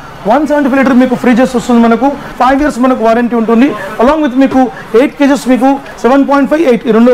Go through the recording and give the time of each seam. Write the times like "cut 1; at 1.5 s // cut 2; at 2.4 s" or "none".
cut 1; at 2.2 s